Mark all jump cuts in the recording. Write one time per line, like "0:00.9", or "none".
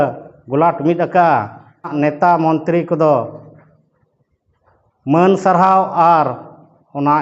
0:01.9

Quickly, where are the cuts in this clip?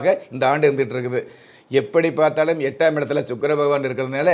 none

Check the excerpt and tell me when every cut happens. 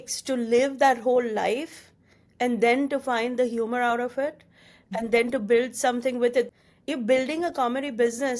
0:06.5

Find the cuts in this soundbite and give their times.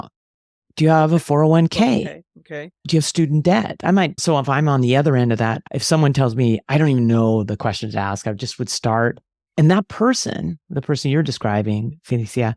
0:04.2
0:05.7

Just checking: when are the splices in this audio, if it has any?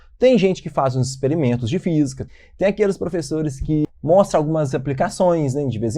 0:02.3
0:03.9

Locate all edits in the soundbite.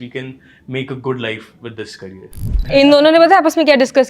0:02.6

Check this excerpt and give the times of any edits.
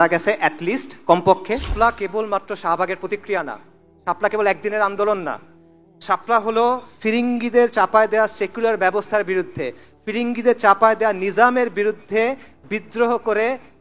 0:01.7

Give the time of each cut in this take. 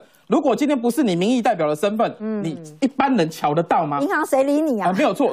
none

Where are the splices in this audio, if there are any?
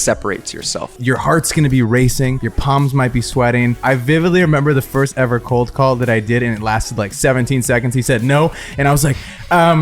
0:01.0
0:02.5
0:03.8

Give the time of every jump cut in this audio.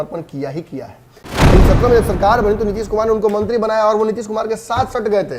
0:01.3

